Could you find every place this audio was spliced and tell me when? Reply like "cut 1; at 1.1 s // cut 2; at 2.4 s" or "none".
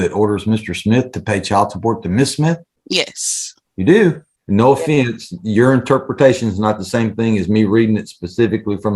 cut 1; at 2.7 s // cut 2; at 4.3 s

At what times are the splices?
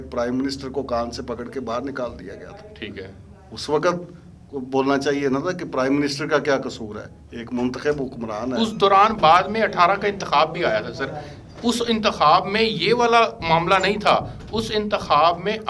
none

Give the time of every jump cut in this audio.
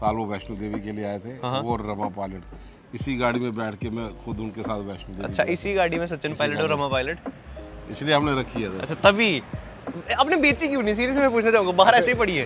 none

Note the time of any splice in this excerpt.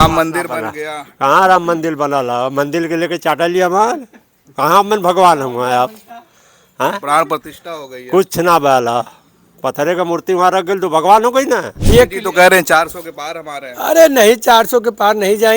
cut 1; at 11.7 s

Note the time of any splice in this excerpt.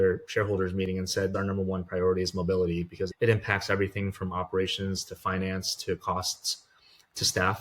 cut 1; at 1.3 s // cut 2; at 3.1 s

